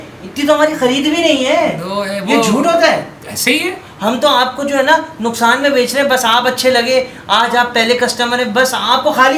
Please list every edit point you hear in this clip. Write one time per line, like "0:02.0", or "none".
none